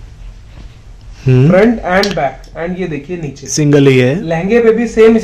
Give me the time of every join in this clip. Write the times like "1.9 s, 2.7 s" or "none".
none